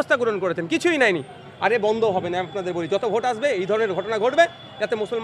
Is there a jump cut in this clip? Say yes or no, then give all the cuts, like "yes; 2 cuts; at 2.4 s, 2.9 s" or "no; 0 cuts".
no; 0 cuts